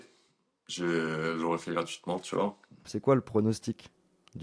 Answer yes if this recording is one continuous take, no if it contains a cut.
no